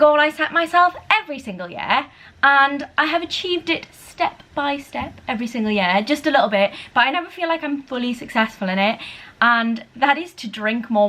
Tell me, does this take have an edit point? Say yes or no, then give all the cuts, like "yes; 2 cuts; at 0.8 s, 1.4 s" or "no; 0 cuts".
no; 0 cuts